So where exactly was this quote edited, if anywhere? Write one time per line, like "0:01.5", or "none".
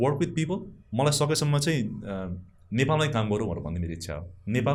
none